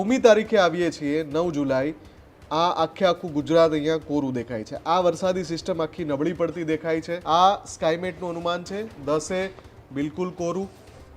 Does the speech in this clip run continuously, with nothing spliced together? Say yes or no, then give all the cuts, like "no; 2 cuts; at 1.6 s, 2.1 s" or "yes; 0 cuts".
no; 1 cut; at 7.2 s